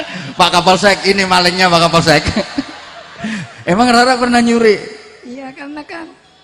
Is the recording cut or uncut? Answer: uncut